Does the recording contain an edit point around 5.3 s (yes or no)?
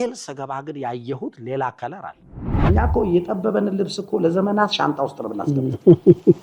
no